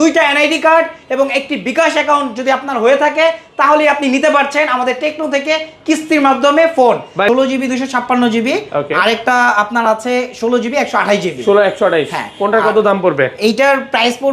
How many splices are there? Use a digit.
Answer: 1